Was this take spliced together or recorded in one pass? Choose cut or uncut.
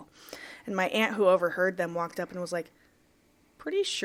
uncut